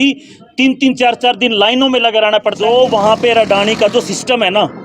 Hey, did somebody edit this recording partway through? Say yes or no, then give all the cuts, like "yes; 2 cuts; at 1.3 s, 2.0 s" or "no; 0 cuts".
yes; 1 cut; at 2.6 s